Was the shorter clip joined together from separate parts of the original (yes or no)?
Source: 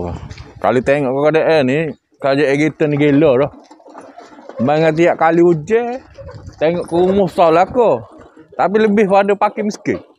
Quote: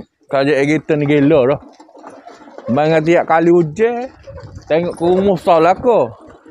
no